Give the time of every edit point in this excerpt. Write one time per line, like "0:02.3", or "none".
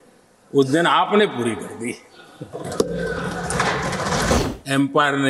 0:04.4